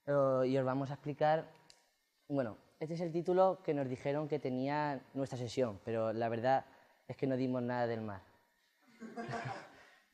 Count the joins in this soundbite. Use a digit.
0